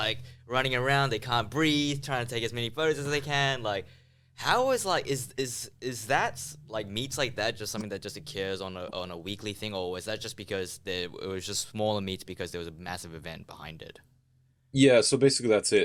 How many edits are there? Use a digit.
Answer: 0